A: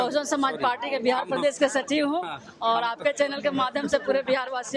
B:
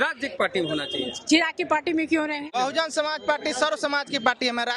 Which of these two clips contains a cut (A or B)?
B